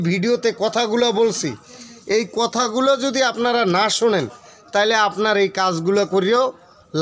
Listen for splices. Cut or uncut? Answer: uncut